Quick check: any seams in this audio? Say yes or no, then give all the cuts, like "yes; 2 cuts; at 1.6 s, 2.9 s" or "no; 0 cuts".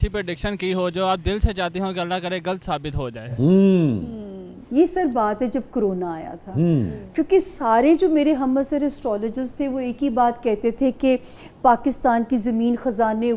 no; 0 cuts